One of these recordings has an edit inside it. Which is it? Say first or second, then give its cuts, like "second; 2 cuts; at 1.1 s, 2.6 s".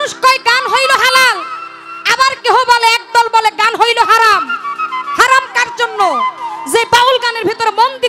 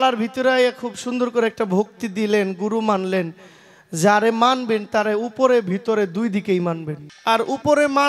second; 1 cut; at 7.0 s